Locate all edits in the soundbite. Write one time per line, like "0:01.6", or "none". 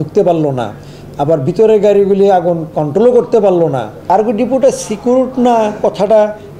0:03.9